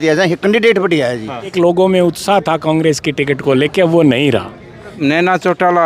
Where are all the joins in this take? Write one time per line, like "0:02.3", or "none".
0:01.5
0:05.0